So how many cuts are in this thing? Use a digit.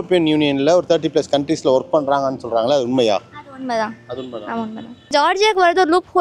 1